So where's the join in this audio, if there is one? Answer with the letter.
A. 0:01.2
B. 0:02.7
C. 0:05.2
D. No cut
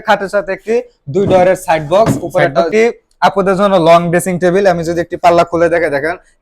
B